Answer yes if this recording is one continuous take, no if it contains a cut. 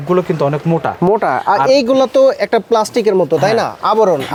yes